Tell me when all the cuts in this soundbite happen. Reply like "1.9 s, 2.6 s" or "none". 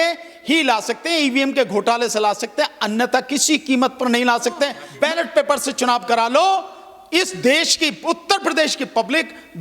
4.8 s